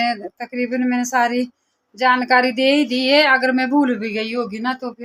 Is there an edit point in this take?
no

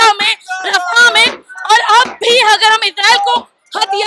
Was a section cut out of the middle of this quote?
no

